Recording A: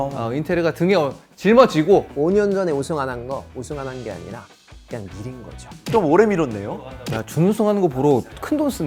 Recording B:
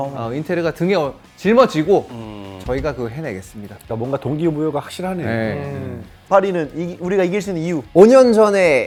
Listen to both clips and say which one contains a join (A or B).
A